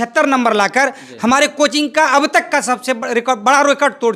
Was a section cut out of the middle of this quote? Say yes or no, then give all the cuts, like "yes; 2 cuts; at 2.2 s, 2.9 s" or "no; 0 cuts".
no; 0 cuts